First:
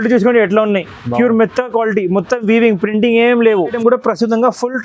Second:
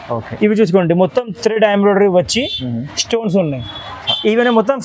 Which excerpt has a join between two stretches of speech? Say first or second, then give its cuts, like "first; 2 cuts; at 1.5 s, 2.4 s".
first; 1 cut; at 3.8 s